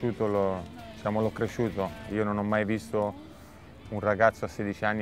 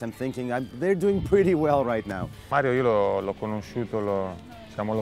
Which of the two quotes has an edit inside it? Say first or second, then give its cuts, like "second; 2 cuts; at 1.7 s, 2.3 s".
second; 1 cut; at 2.4 s